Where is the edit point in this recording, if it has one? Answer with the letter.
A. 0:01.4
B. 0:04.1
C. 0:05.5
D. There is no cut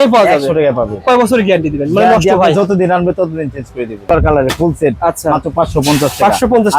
B